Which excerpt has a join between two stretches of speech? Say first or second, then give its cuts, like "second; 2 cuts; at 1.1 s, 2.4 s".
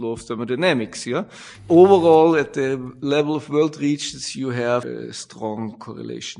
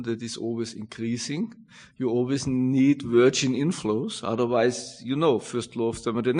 first; 2 cuts; at 1.6 s, 4.8 s